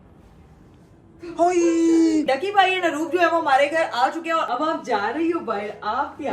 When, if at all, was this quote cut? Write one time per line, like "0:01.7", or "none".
0:02.2
0:04.5